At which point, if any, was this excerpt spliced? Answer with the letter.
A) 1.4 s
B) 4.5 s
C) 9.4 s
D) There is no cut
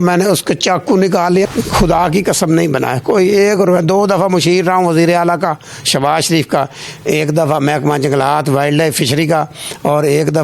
A